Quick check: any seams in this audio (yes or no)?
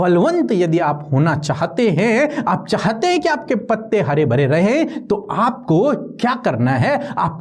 no